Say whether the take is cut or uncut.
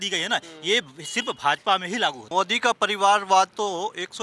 cut